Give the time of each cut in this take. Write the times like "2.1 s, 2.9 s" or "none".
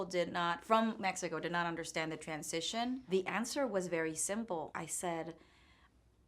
3.1 s, 4.7 s